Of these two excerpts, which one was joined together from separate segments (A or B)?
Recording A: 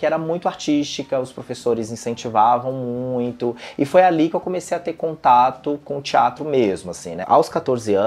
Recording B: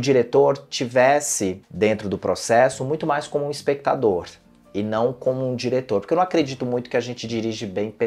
A